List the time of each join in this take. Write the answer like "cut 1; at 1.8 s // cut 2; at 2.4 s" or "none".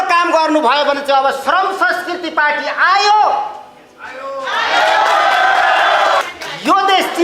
none